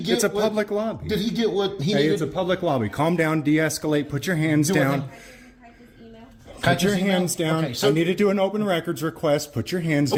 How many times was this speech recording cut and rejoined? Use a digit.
0